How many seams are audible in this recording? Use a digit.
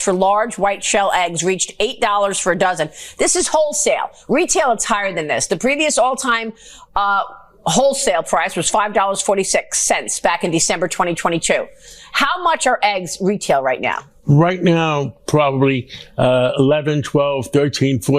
0